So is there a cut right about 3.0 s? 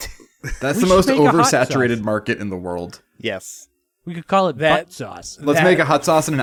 no; 0 cuts

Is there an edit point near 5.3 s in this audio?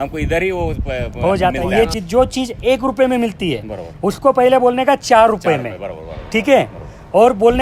no; 1 cut; at 1.9 s

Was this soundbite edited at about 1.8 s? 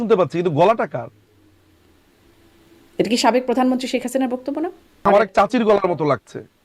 no; 1 cut; at 5.0 s

